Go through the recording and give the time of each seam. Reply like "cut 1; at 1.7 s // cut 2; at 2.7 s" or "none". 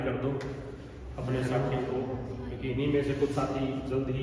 none